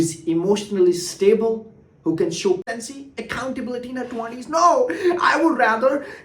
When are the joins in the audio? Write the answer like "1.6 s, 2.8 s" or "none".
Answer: 2.6 s